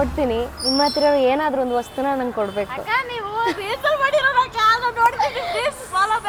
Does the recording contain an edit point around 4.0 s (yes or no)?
no